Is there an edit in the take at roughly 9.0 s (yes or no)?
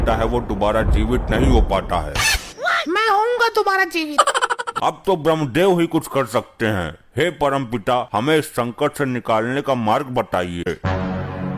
no